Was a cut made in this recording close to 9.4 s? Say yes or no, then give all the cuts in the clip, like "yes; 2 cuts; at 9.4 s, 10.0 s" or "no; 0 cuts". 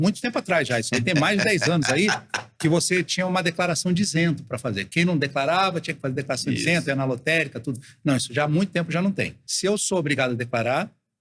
yes; 1 cut; at 9.4 s